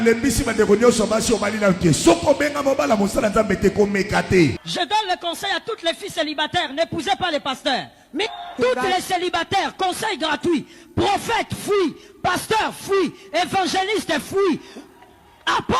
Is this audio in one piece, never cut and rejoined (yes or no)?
no